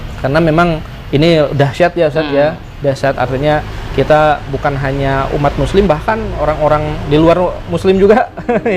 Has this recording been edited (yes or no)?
no